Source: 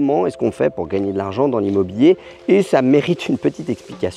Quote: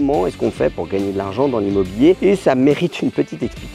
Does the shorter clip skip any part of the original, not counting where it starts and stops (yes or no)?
yes